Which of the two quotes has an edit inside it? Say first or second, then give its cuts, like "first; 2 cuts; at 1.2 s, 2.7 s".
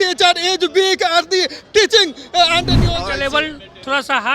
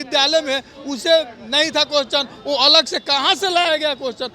first; 1 cut; at 2.8 s